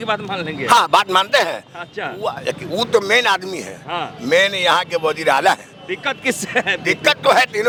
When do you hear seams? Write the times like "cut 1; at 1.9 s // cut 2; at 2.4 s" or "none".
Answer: none